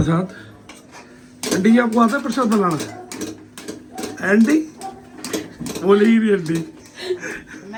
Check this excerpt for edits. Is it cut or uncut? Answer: uncut